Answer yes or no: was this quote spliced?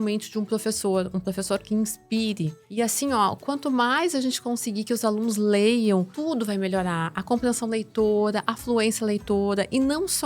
yes